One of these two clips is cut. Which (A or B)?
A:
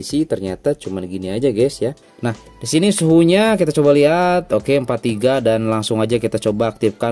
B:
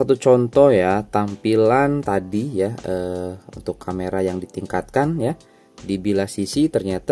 A